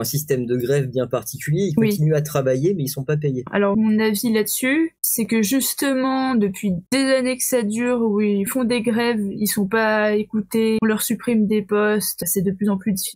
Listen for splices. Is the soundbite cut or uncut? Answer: cut